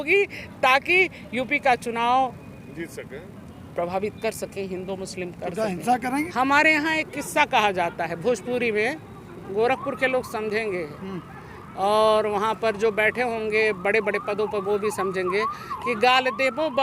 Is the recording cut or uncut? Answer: cut